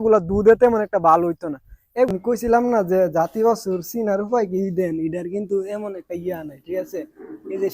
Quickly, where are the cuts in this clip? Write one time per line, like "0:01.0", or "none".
0:02.1